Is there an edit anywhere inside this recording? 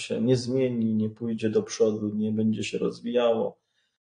no; 0 cuts

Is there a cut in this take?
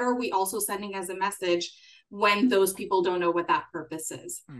no; 0 cuts

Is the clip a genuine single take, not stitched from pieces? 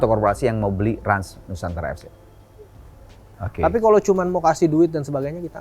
no; 1 cut; at 3.3 s

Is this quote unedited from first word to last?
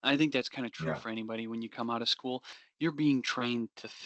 no; 1 cut; at 2.5 s

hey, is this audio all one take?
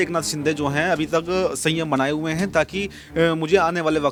yes; 0 cuts

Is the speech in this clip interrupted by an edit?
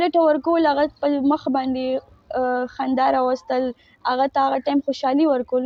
no; 0 cuts

